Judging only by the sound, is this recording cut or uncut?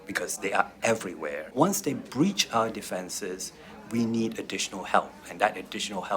cut